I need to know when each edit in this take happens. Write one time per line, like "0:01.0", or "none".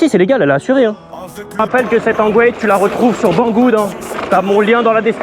0:01.6